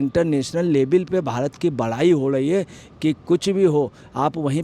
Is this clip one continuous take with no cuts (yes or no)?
yes